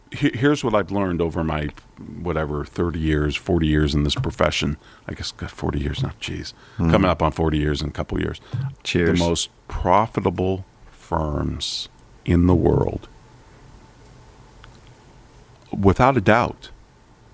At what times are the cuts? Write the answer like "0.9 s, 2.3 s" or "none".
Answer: none